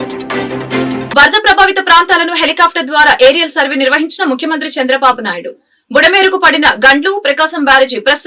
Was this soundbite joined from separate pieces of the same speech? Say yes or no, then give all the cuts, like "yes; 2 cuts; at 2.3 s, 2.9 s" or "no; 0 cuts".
yes; 1 cut; at 1.1 s